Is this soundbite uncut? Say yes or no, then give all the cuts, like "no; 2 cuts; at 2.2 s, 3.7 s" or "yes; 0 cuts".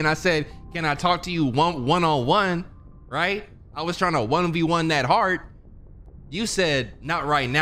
yes; 0 cuts